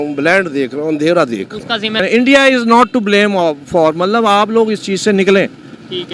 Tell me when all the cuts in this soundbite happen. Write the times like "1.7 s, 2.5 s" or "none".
2.0 s

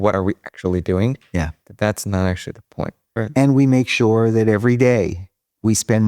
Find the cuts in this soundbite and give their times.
3.0 s

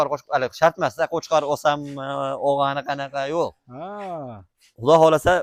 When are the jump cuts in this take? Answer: none

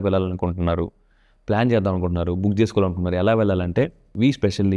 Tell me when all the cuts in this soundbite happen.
none

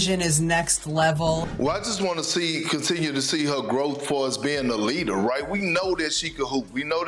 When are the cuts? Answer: 1.5 s

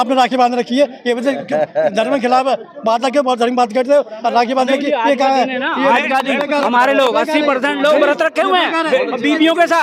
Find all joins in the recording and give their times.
none

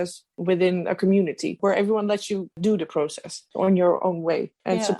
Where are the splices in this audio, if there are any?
none

